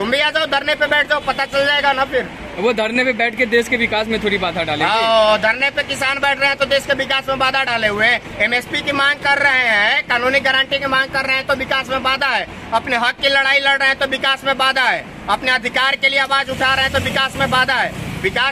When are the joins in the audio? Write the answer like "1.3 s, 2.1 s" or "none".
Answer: none